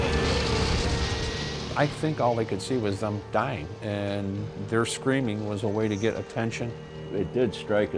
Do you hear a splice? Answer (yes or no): yes